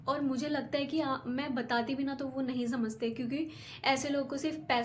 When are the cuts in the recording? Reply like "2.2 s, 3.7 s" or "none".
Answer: none